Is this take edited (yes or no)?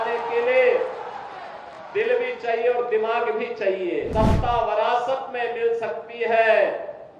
yes